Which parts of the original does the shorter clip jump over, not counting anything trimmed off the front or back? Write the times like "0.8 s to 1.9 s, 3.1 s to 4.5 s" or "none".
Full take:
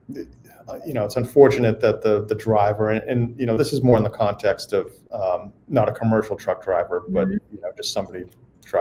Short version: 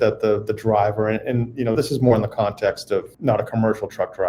4.9 s to 5.6 s